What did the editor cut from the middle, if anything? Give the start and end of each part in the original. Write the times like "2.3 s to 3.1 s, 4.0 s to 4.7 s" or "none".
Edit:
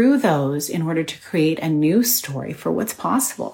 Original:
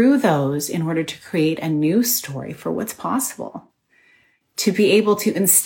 none